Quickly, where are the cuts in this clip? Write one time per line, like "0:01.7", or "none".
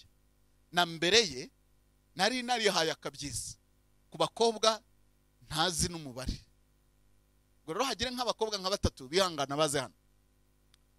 none